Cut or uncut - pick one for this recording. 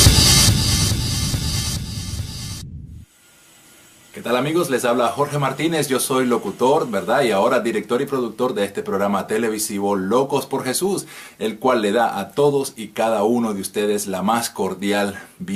uncut